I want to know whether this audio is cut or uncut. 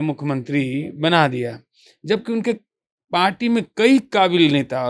uncut